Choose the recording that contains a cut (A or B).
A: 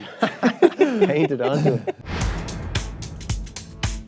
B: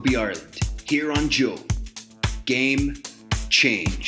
A